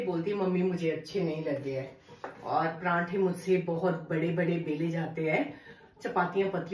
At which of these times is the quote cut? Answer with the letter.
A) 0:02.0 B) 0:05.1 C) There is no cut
C